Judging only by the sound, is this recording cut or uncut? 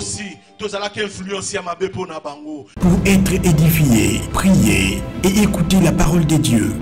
cut